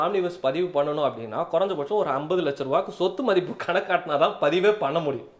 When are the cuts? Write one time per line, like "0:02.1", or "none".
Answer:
none